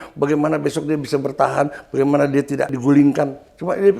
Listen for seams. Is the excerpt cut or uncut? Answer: cut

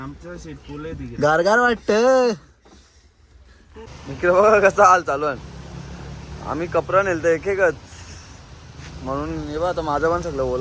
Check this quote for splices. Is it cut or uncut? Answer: cut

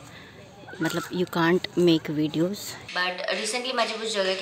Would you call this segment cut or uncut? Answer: cut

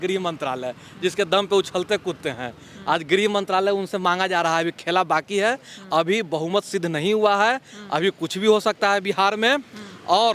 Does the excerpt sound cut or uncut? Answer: uncut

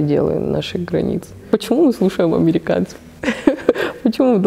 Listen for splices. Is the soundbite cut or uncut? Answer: cut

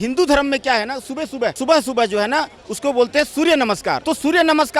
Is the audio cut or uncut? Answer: cut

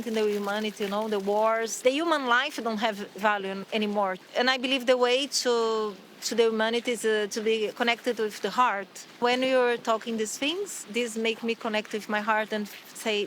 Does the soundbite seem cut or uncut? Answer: cut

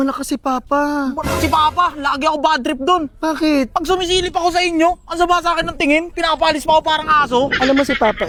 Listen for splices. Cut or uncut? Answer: uncut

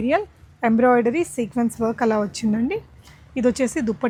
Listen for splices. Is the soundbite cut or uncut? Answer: uncut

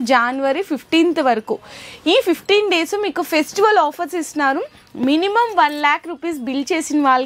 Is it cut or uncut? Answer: uncut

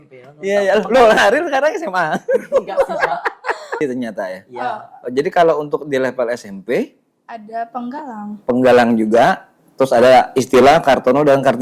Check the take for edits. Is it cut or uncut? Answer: cut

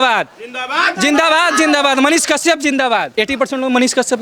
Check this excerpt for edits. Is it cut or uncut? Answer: cut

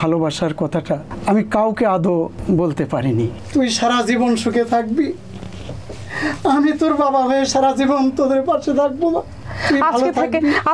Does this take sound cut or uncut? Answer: cut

